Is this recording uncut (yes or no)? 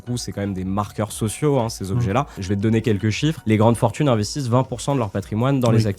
no